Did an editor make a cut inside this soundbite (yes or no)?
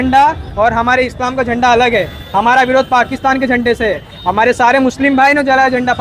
no